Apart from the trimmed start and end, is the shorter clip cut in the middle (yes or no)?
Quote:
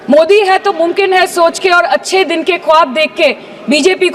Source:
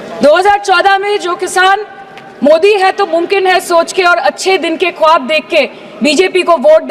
no